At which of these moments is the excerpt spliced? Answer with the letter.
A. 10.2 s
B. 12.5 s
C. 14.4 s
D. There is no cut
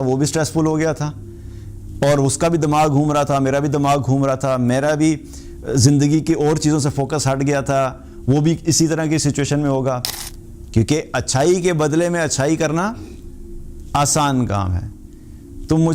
A